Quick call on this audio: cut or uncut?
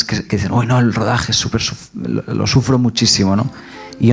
uncut